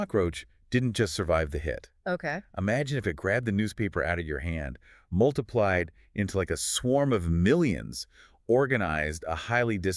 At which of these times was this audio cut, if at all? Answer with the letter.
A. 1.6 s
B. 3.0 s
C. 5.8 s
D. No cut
D